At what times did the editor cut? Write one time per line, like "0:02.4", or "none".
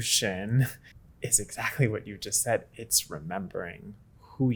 none